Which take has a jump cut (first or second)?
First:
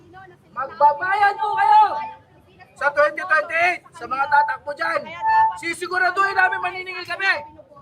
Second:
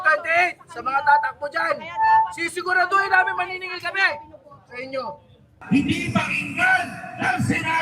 second